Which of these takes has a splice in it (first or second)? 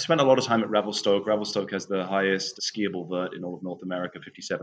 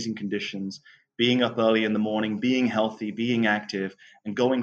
first